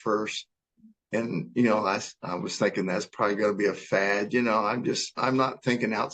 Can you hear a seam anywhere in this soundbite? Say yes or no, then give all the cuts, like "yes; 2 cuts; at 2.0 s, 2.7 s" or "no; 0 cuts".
yes; 1 cut; at 5.2 s